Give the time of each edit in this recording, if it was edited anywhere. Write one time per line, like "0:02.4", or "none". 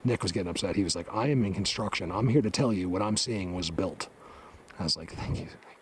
none